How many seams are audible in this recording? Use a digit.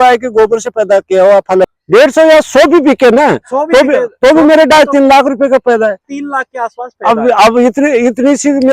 1